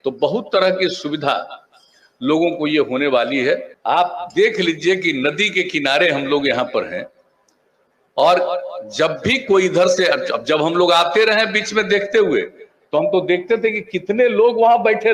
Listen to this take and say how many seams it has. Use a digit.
1